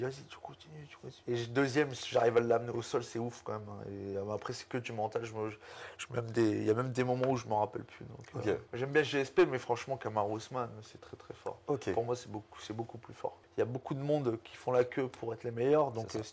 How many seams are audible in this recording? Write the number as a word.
three